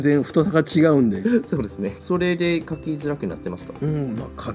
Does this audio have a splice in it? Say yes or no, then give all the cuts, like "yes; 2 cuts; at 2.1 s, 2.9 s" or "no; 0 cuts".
yes; 1 cut; at 1.9 s